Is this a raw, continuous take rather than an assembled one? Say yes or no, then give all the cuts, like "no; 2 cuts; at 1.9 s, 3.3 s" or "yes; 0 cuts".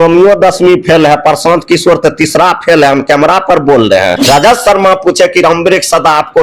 no; 1 cut; at 4.2 s